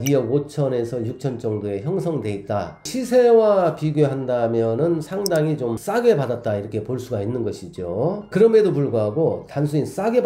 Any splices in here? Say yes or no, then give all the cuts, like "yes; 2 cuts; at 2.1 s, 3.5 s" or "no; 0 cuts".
yes; 2 cuts; at 2.8 s, 5.3 s